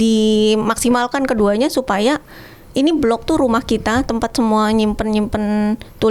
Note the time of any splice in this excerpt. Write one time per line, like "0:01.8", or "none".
none